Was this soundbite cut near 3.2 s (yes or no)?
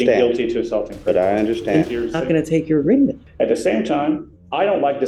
yes